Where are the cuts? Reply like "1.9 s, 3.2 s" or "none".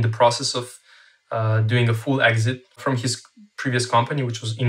2.8 s